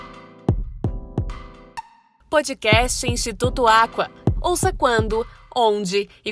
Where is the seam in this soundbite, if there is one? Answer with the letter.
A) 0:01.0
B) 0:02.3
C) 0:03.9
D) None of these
A